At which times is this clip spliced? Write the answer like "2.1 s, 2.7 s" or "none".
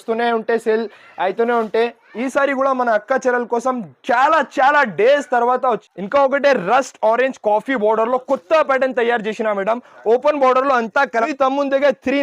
5.8 s, 11.3 s